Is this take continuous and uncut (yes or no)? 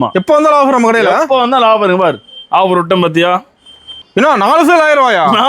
no